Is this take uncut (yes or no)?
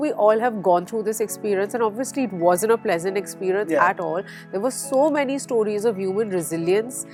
yes